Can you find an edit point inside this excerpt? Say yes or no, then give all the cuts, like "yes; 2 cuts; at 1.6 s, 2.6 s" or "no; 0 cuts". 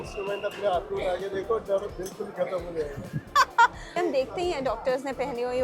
yes; 1 cut; at 4.0 s